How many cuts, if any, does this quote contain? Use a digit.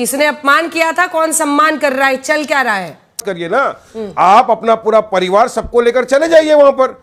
1